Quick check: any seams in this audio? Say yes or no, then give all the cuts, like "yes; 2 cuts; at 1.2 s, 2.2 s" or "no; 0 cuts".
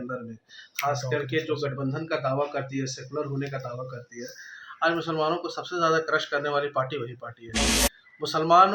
no; 0 cuts